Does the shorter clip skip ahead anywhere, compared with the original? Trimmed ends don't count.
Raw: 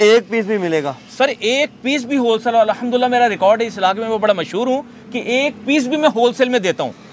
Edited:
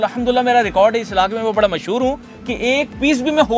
no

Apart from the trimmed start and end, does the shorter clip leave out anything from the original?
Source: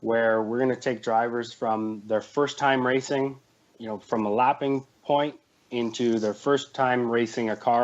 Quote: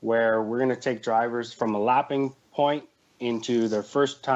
yes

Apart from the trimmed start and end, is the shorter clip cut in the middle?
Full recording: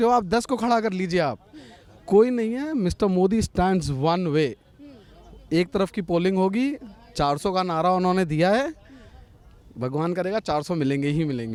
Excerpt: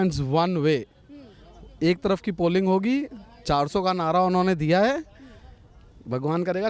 no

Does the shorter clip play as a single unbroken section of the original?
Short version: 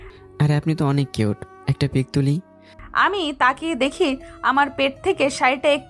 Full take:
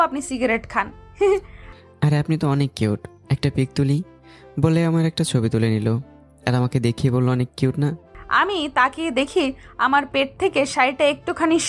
no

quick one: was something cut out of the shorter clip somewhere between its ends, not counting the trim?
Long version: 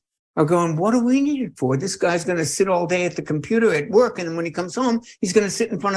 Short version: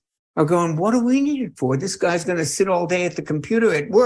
no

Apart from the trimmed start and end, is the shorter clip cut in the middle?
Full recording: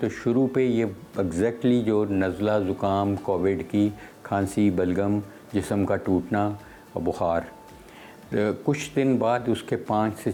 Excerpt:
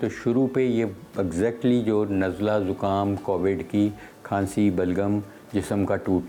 no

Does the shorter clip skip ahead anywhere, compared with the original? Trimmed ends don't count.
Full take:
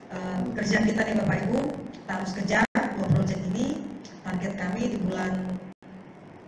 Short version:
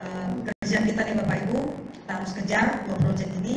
yes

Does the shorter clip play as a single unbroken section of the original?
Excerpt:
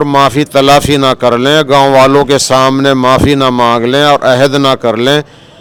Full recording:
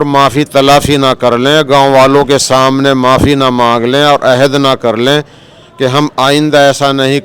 yes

